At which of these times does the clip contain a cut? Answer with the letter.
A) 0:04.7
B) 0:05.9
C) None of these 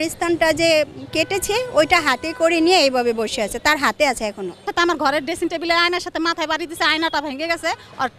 A